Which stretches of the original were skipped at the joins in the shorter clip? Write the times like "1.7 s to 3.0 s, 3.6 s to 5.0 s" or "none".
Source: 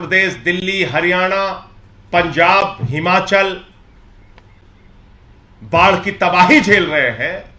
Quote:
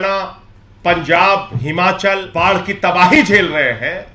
3.5 s to 5.6 s